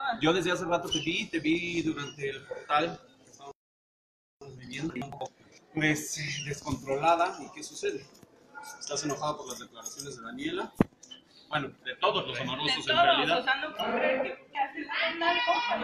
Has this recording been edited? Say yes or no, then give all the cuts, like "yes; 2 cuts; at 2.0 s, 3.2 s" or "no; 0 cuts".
no; 0 cuts